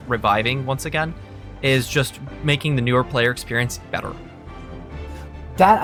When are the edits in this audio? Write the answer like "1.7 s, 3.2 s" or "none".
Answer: none